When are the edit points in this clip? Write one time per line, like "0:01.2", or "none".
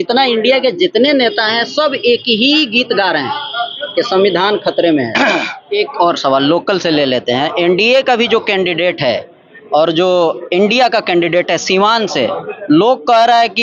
0:05.6